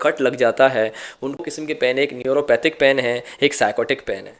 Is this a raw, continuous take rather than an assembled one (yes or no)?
no